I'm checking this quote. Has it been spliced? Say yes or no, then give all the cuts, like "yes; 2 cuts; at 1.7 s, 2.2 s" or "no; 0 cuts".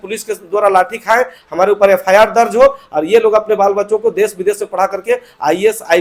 no; 0 cuts